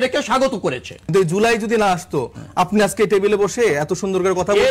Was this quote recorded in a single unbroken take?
no; 1 cut; at 1.1 s

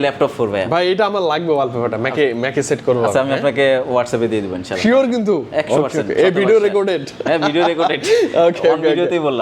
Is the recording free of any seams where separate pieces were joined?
yes; 0 cuts

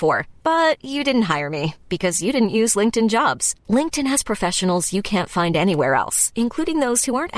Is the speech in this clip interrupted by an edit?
no; 0 cuts

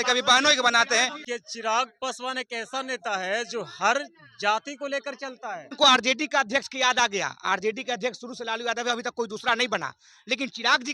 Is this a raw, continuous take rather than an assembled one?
no; 2 cuts; at 1.2 s, 5.7 s

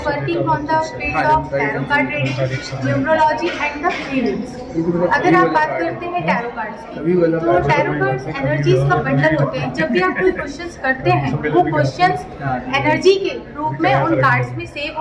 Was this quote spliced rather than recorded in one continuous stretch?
no; 0 cuts

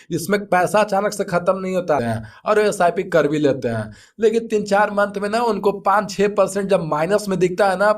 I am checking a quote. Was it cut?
yes; 1 cut; at 2.0 s

